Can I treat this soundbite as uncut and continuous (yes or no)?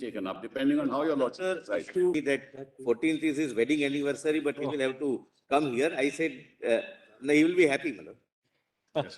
no